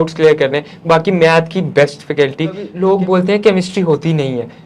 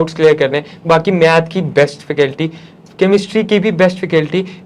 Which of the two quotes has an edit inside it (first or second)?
first